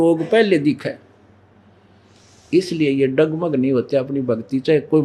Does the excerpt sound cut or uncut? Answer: uncut